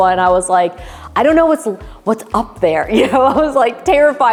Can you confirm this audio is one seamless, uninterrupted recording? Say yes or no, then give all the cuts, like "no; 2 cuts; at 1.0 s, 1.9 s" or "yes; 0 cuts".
yes; 0 cuts